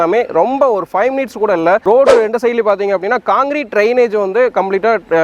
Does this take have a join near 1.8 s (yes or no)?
yes